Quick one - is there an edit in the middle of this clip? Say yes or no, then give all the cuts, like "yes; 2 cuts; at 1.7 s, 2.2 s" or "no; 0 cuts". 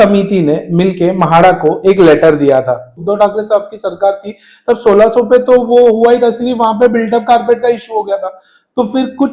yes; 1 cut; at 3.0 s